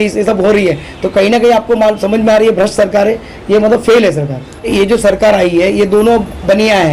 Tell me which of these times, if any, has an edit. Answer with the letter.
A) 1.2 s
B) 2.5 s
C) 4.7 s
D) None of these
C